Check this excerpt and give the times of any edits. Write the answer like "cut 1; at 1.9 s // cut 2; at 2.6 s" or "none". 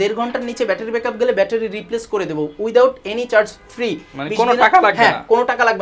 none

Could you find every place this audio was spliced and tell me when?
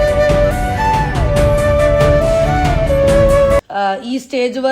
cut 1; at 3.7 s

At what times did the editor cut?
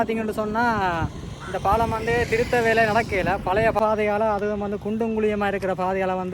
cut 1; at 3.8 s

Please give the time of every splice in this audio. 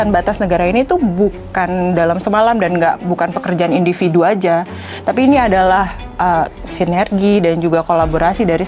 none

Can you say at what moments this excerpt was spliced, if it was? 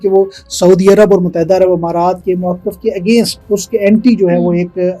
cut 1; at 2.2 s // cut 2; at 3.4 s

